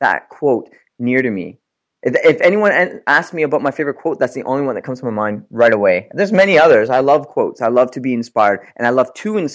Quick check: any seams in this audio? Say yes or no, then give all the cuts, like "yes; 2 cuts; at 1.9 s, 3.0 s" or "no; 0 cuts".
no; 0 cuts